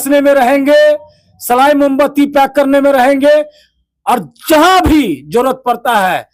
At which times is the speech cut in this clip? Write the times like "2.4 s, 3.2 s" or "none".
none

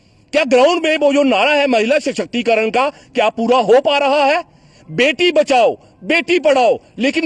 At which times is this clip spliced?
none

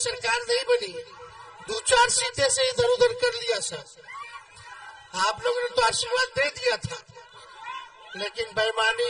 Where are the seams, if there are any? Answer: none

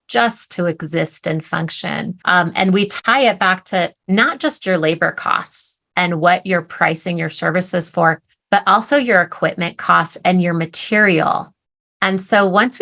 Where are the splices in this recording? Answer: 2.2 s, 3.0 s

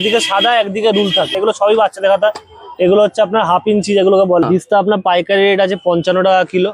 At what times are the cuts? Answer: 1.3 s, 4.4 s

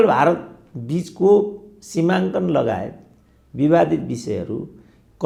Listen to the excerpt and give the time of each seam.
none

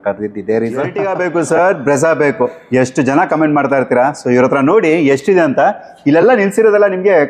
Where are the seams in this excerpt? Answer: 1.0 s

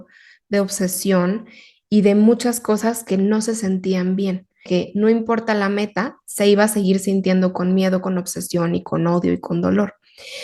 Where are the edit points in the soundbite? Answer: 4.6 s

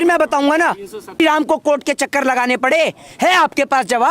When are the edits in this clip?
1.2 s

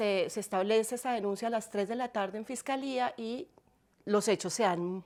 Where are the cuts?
none

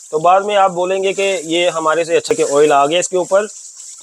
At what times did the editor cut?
2.3 s

